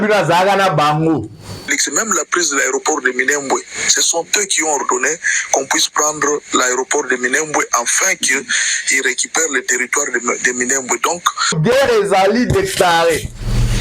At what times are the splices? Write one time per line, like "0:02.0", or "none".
0:01.6
0:11.6